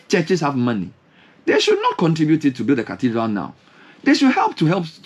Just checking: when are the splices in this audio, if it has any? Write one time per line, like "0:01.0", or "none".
none